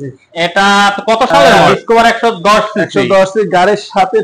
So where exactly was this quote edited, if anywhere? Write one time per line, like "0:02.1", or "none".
0:01.4